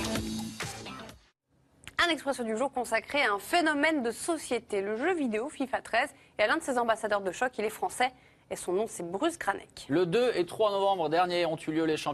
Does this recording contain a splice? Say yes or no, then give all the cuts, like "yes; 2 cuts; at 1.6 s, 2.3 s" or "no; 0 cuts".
no; 0 cuts